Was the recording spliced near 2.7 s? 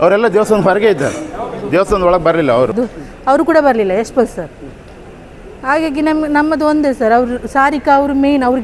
yes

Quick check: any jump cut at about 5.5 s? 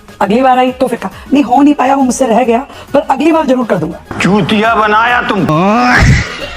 yes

